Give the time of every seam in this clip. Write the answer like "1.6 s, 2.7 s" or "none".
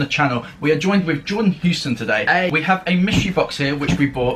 none

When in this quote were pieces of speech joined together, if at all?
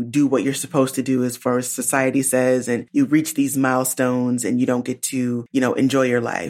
2.8 s, 5.4 s

